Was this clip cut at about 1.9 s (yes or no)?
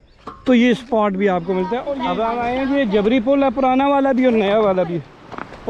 yes